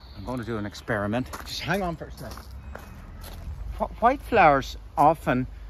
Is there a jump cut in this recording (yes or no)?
yes